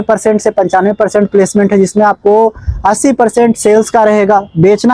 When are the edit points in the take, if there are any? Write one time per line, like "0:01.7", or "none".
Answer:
none